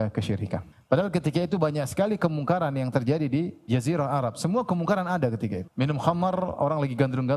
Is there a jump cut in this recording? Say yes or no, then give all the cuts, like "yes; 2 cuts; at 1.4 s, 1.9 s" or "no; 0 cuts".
no; 0 cuts